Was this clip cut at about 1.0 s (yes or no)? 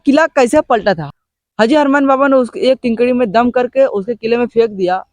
yes